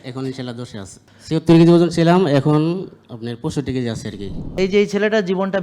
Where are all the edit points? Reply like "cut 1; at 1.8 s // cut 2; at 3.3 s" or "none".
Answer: cut 1; at 1.0 s // cut 2; at 4.6 s

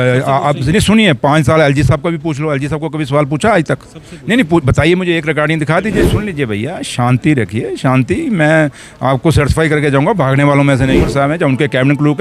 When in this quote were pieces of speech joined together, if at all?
cut 1; at 6.2 s // cut 2; at 11.1 s

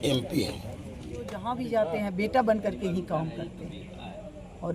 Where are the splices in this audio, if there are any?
cut 1; at 1.3 s

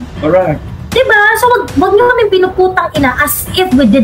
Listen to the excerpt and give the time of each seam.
none

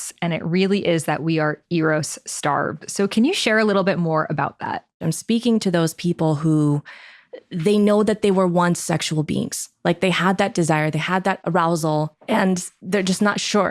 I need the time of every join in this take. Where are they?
cut 1; at 5.0 s

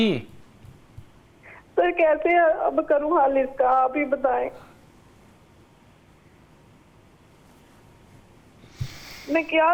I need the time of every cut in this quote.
none

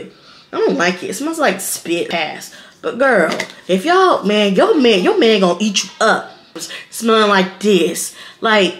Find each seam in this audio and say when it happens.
cut 1; at 2.1 s // cut 2; at 6.6 s

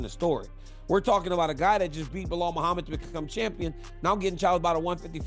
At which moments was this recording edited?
none

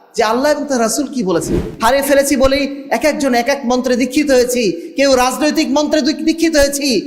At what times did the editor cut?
cut 1; at 1.7 s

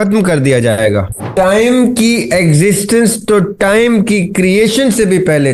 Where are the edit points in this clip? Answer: cut 1; at 1.2 s

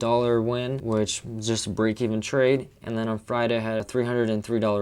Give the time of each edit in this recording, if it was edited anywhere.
cut 1; at 0.8 s // cut 2; at 3.9 s

